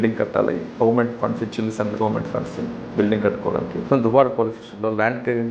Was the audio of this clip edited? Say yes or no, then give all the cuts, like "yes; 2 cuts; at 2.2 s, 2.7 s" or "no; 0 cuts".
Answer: yes; 1 cut; at 3.8 s